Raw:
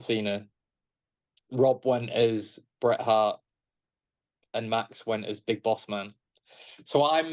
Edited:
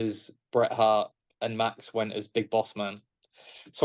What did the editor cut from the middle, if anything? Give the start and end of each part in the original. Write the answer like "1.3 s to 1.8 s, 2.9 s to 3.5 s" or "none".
3.5 s to 4.4 s